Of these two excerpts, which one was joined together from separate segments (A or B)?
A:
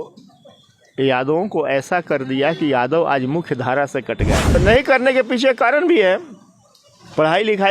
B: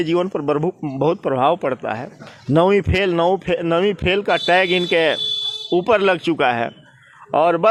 A